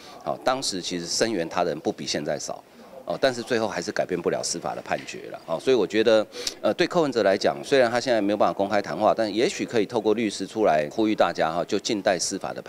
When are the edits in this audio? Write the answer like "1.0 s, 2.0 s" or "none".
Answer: 10.9 s